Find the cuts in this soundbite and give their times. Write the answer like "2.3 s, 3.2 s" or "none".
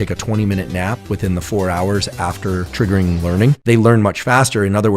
3.6 s